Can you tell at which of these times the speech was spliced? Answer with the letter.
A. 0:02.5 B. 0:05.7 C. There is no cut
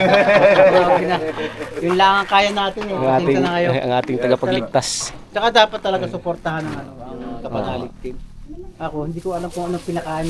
C